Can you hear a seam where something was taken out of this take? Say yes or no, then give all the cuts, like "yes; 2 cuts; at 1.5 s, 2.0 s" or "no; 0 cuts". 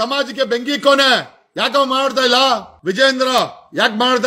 yes; 1 cut; at 2.7 s